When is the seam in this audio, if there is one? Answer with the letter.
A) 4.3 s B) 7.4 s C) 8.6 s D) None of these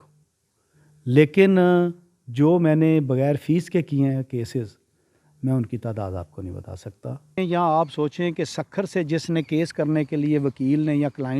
B